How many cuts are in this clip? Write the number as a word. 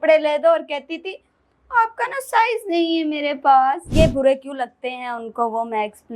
one